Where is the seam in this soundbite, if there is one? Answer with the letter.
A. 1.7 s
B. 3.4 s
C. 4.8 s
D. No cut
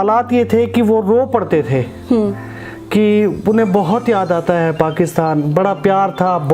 D